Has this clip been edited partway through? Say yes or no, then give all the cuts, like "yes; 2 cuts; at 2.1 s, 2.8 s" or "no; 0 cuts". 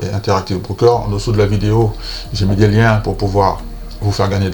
no; 0 cuts